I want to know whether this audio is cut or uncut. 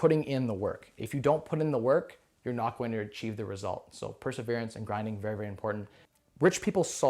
uncut